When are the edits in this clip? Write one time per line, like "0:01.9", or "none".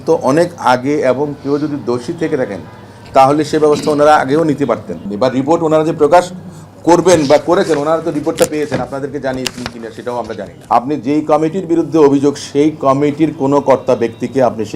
0:05.0
0:10.5